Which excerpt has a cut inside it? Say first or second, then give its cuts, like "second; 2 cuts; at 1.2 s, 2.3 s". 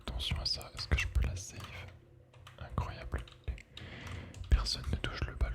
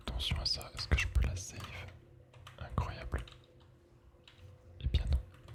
first; 1 cut; at 3.6 s